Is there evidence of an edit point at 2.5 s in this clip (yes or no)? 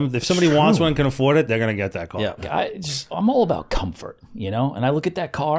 yes